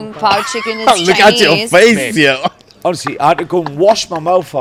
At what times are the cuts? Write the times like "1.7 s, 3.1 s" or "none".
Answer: none